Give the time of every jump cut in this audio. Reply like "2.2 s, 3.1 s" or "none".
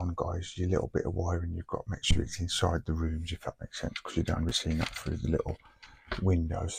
none